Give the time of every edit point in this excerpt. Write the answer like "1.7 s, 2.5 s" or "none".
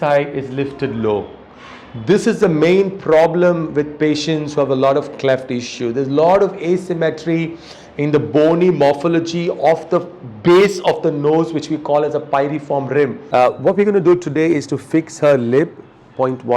13.2 s